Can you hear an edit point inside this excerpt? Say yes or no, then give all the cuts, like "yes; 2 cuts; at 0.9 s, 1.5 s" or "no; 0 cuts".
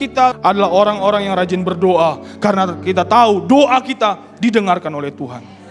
no; 0 cuts